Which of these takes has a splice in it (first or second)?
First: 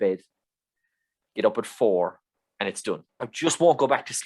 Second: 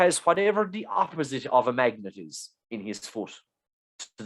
first